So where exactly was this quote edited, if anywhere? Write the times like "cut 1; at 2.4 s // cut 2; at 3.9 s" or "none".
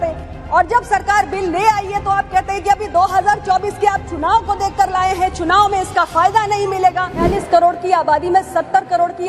cut 1; at 7.2 s